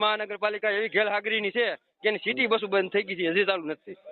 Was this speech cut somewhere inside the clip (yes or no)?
no